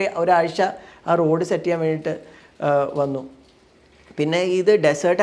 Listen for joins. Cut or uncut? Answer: uncut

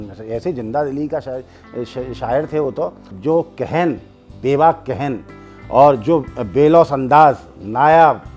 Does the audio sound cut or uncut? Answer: cut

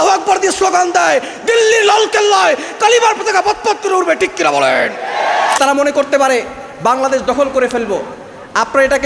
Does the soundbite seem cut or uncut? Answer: cut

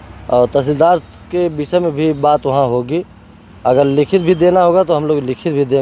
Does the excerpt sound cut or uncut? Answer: uncut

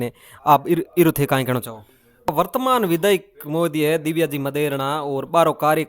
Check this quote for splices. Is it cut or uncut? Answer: cut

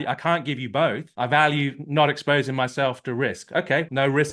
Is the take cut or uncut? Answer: cut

